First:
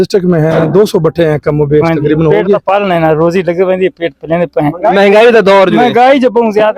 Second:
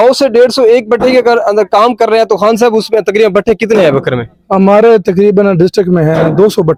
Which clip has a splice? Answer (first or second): first